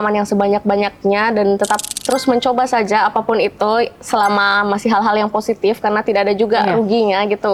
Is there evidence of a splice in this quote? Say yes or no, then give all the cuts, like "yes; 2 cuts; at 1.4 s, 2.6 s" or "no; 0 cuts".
no; 0 cuts